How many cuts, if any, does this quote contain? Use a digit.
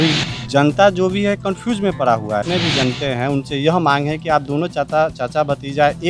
1